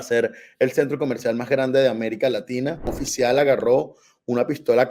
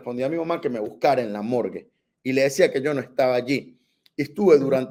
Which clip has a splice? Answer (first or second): first